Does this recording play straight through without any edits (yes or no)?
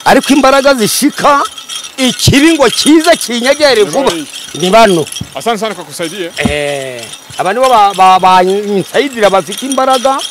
yes